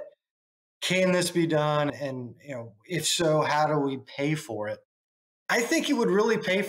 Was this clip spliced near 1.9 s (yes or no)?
yes